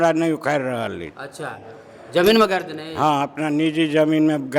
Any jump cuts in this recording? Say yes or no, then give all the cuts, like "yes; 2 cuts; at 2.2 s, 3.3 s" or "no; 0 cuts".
no; 0 cuts